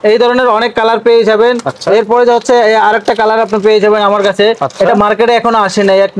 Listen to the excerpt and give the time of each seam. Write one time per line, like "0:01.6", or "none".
none